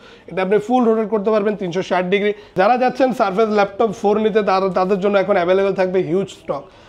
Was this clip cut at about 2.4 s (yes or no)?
yes